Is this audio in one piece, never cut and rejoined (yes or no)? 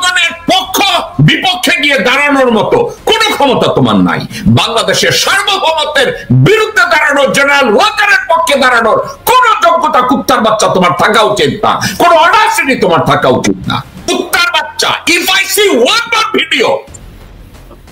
no